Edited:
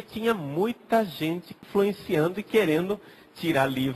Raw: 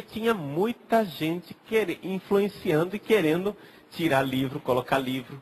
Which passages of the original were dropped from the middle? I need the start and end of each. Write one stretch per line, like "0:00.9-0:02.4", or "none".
0:01.6-0:02.1

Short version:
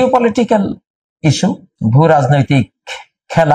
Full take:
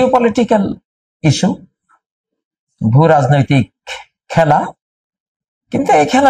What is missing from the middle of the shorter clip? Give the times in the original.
0:01.7-0:02.7

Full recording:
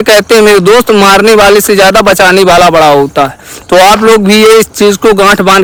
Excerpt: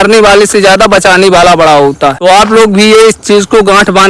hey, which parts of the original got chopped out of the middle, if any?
0:03.3-0:03.7

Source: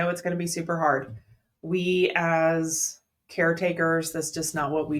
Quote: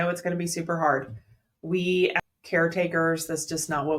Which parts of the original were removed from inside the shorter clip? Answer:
0:02.2-0:03.0

